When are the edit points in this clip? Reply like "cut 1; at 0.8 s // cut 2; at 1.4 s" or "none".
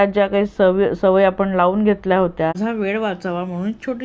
cut 1; at 2.6 s